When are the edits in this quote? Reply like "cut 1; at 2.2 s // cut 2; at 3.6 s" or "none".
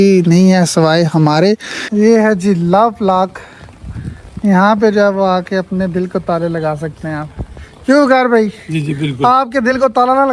cut 1; at 1.8 s